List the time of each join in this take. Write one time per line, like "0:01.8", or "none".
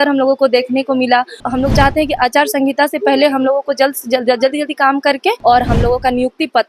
0:01.5
0:05.4